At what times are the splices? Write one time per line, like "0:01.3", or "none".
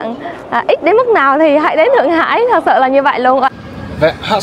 0:03.5